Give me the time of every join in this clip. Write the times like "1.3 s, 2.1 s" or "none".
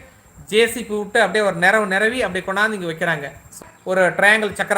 3.6 s